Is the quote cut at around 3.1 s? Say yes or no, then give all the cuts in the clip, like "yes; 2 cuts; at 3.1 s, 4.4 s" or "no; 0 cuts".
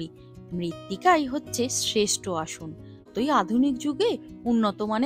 yes; 1 cut; at 3.1 s